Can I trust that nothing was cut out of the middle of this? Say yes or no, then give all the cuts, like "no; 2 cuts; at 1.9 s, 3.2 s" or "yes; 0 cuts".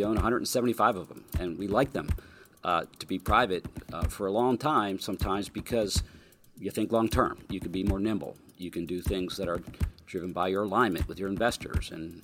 yes; 0 cuts